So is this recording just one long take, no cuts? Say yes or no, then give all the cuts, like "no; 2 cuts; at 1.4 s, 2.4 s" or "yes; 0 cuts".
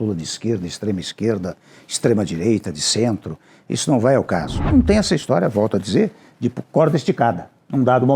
no; 1 cut; at 4.6 s